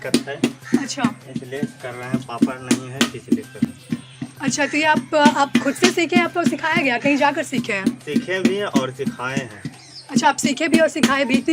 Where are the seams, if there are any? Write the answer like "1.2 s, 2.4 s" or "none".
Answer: none

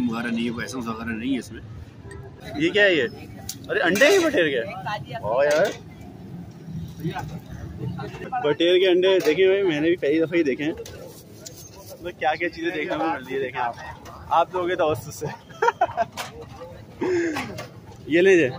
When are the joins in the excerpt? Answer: 2.4 s, 8.3 s

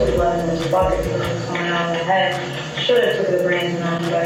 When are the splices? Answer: none

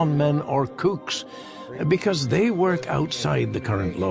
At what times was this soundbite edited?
2.4 s

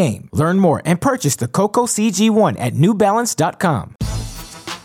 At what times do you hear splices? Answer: 3.9 s

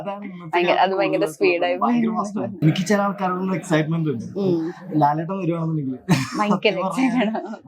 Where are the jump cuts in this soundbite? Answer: 2.5 s

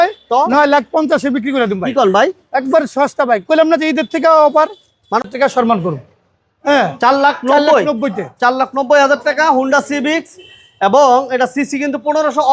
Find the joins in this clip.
5.2 s

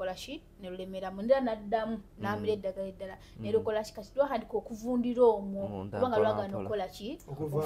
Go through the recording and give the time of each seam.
none

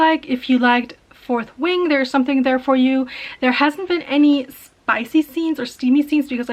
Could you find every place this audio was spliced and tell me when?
none

